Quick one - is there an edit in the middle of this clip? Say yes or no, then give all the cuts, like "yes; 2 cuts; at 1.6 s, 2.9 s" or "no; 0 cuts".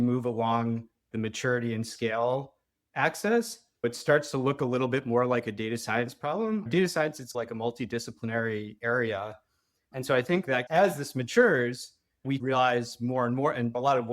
yes; 3 cuts; at 1.0 s, 6.7 s, 10.7 s